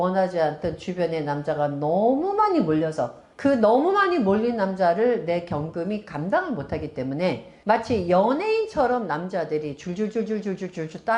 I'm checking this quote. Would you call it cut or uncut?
uncut